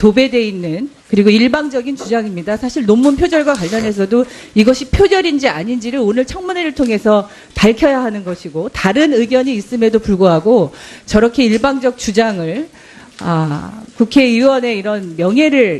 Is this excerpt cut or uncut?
uncut